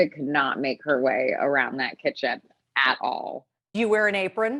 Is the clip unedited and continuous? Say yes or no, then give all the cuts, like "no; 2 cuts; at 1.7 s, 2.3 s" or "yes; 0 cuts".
no; 1 cut; at 3.7 s